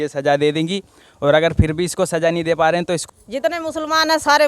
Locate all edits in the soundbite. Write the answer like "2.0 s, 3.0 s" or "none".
3.0 s